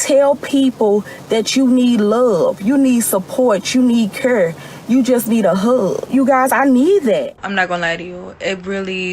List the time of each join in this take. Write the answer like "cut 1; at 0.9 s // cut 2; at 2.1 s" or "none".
cut 1; at 6.1 s // cut 2; at 7.4 s